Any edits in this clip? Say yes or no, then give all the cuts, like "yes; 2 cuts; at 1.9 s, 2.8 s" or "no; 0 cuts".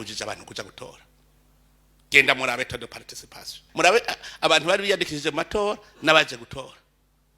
yes; 1 cut; at 3.6 s